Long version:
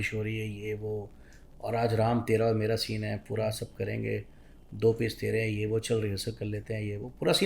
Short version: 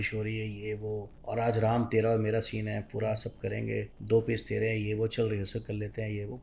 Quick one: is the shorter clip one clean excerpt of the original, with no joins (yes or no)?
no